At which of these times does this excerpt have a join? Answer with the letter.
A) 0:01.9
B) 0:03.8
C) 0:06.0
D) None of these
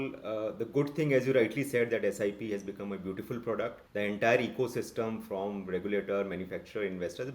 B